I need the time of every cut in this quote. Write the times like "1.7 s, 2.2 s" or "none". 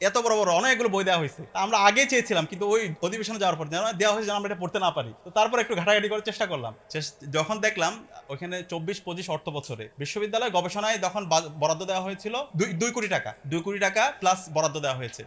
none